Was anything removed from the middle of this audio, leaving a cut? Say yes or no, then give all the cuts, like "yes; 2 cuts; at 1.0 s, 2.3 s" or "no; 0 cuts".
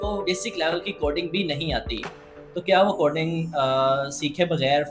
no; 0 cuts